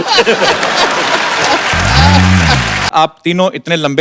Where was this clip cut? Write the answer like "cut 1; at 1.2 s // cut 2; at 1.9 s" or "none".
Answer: cut 1; at 2.9 s